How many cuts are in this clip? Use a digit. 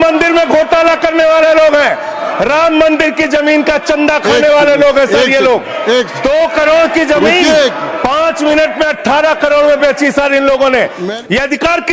1